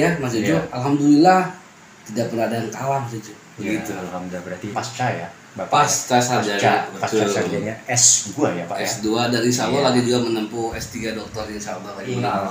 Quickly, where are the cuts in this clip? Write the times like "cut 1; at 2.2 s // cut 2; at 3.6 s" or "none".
cut 1; at 4.7 s

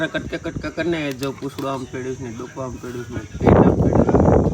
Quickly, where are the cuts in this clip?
none

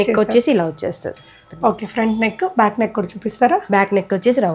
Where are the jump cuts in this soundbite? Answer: none

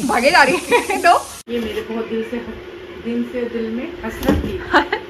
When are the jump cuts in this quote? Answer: cut 1; at 1.3 s

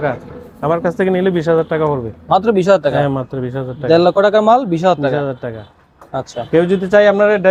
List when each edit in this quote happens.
none

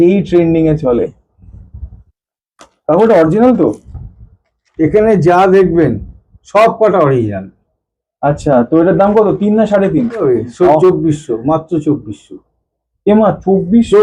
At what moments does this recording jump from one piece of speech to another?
cut 1; at 2.0 s // cut 2; at 10.2 s

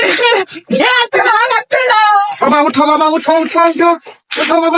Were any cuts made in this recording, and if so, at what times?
none

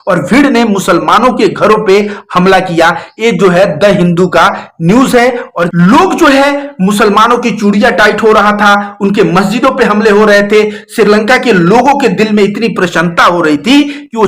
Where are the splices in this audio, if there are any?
cut 1; at 5.7 s

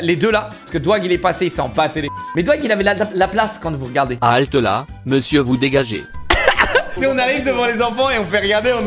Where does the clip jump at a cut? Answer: cut 1; at 6.9 s

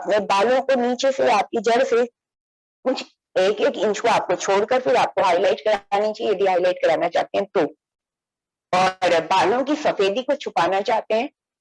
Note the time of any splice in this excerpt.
none

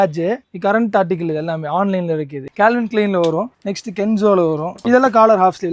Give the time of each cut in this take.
cut 1; at 2.4 s

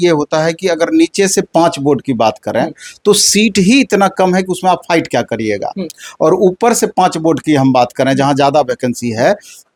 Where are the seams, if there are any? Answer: none

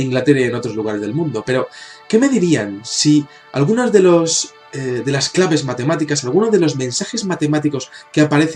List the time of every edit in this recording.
none

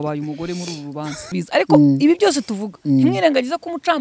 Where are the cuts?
cut 1; at 1.4 s

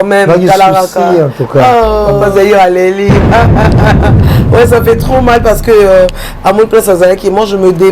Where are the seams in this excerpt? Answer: cut 1; at 2.2 s

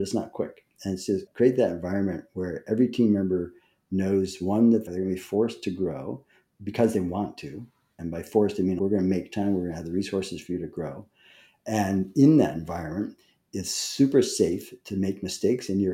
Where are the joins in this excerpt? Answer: cut 1; at 1.3 s // cut 2; at 4.9 s // cut 3; at 8.8 s

